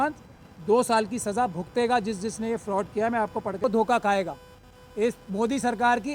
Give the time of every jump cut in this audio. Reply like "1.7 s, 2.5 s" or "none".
3.6 s